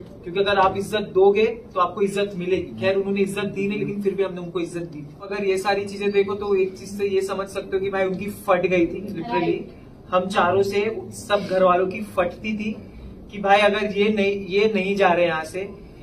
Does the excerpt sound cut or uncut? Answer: cut